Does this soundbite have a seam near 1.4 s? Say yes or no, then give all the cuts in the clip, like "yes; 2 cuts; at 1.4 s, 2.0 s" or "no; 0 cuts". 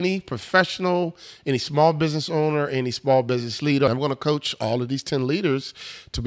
no; 1 cut; at 3.9 s